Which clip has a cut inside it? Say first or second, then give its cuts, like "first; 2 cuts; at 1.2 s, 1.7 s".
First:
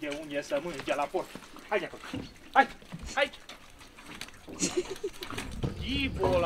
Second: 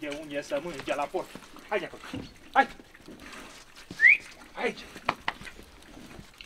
first; 1 cut; at 2.9 s